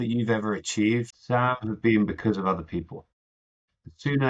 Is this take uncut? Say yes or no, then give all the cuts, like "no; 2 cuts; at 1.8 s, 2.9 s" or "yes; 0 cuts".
no; 1 cut; at 1.1 s